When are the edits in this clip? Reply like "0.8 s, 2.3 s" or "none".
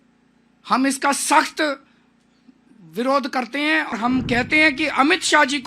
3.9 s